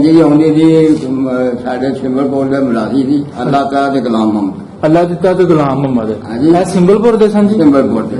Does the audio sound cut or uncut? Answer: uncut